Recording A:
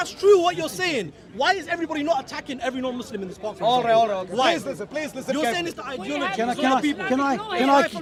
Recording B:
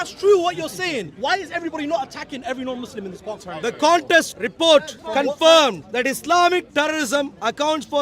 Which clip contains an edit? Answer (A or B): B